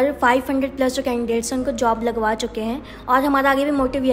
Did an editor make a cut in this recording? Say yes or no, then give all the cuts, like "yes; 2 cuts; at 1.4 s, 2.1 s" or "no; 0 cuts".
no; 0 cuts